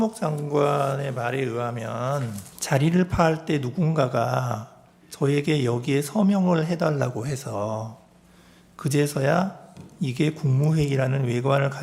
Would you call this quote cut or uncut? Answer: cut